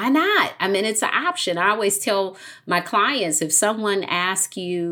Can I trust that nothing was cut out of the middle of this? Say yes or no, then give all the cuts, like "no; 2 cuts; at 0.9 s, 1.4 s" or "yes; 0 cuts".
yes; 0 cuts